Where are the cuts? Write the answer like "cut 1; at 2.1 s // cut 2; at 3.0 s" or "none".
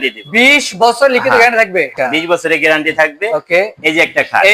cut 1; at 1.9 s